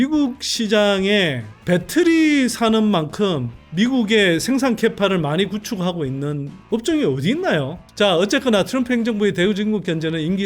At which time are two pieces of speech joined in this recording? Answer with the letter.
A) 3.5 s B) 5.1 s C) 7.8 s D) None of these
C